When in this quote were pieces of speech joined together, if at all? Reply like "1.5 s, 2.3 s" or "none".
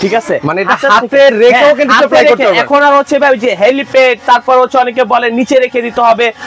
none